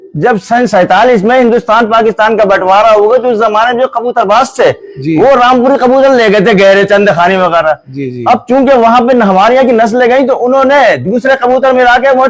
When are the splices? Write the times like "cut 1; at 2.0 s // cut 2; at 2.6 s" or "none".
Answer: none